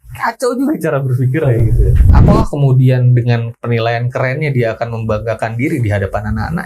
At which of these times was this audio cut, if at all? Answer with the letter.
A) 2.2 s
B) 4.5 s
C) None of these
A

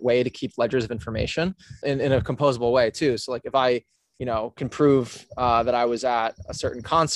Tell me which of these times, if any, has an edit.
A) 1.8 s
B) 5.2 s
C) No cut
A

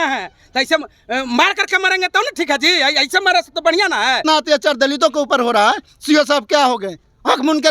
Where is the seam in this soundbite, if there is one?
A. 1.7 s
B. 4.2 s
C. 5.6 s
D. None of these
B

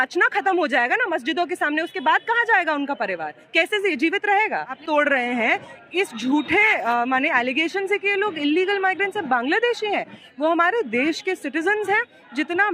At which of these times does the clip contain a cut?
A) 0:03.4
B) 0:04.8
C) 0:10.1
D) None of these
B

